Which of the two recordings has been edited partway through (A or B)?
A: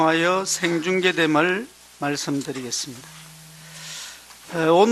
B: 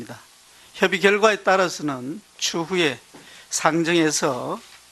B